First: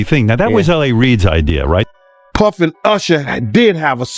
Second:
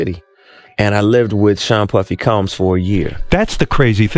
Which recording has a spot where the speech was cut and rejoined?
first; 1 cut; at 1.9 s

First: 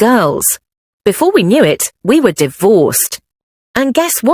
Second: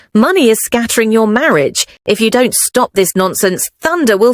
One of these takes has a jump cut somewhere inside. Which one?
second; 1 cut; at 1.9 s

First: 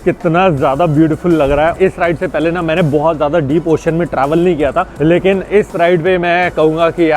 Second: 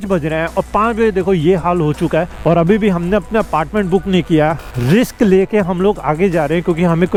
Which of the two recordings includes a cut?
first; 2 cuts; at 1.7 s, 4.9 s

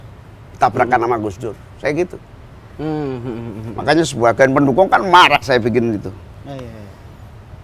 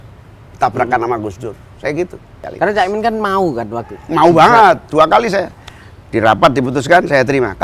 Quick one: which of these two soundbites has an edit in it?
second; 1 cut; at 2.4 s

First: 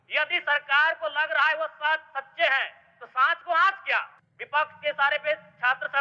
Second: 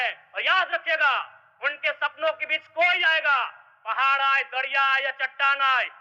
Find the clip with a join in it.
first; 1 cut; at 4.2 s

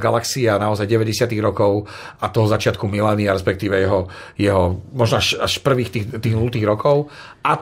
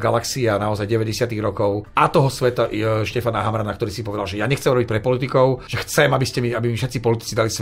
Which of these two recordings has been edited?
second; 2 cuts; at 1.8 s, 5.7 s

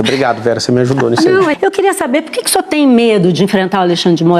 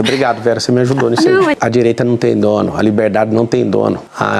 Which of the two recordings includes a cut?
first; 1 cut; at 1.6 s

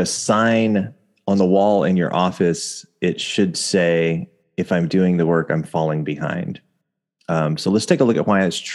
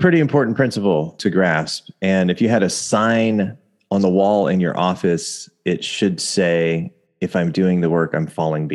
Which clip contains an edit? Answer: second; 1 cut; at 1.2 s

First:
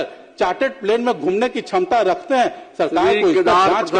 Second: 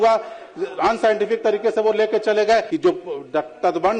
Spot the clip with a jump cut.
second; 1 cut; at 2.7 s

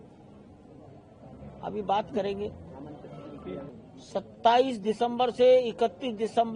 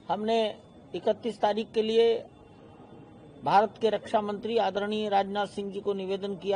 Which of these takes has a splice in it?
first; 1 cut; at 3.7 s

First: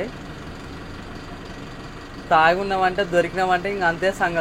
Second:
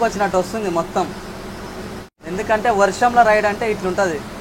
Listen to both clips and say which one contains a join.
second; 1 cut; at 2.2 s

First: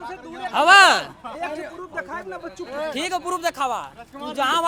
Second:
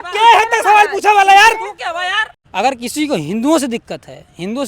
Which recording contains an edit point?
second; 1 cut; at 2.3 s

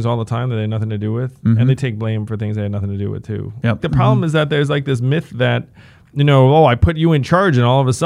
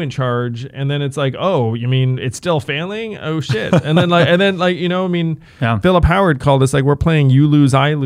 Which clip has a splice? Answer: first; 1 cut; at 3.8 s

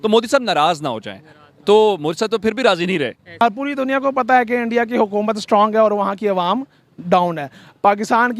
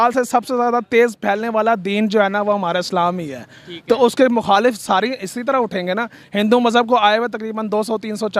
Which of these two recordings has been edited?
first; 1 cut; at 3.4 s

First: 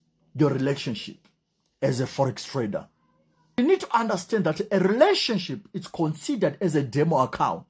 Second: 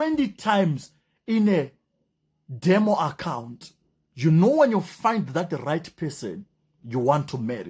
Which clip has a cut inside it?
first; 1 cut; at 3.6 s

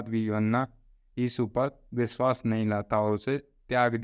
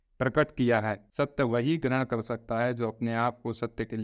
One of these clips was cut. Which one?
second; 1 cut; at 1.0 s

